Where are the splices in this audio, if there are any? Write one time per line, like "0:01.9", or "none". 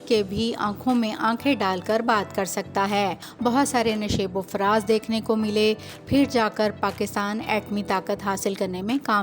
0:03.2